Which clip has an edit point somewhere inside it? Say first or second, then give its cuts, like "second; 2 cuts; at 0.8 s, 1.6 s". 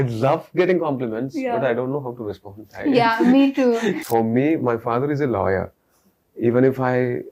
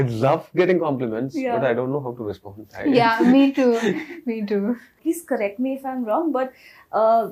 first; 1 cut; at 4.0 s